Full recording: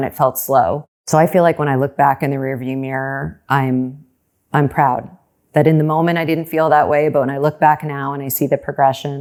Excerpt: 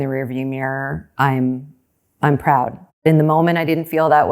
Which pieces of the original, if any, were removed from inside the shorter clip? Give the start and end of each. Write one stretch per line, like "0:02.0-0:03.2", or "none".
0:05.4-0:05.6